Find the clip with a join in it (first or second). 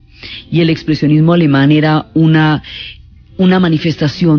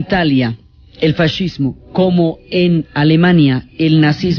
second